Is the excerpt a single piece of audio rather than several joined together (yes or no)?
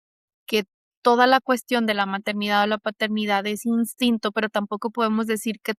yes